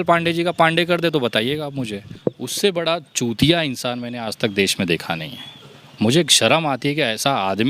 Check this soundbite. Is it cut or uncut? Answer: cut